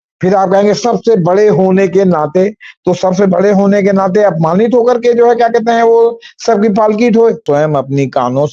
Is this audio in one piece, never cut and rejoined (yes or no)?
no